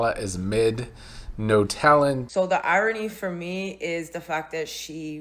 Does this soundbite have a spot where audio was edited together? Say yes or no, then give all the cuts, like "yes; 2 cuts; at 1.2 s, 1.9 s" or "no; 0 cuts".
yes; 1 cut; at 2.3 s